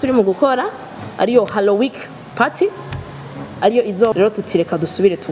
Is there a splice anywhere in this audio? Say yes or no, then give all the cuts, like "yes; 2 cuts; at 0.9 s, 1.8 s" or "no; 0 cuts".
yes; 1 cut; at 4.1 s